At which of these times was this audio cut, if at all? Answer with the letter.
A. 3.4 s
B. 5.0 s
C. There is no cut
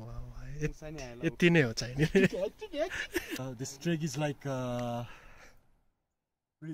A